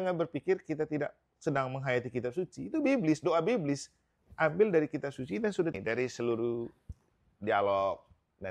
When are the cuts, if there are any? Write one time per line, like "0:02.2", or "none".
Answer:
0:05.8

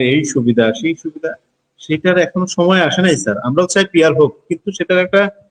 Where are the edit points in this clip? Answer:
none

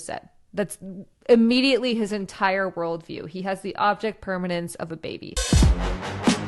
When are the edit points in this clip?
0:05.4

